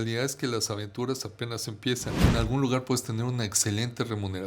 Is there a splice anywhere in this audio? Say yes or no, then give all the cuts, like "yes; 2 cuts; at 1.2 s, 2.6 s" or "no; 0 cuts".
yes; 1 cut; at 2.3 s